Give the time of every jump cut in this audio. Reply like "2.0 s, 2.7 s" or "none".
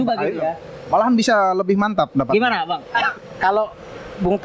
3.0 s